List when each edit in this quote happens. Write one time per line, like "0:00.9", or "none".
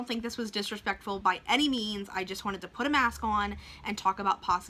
none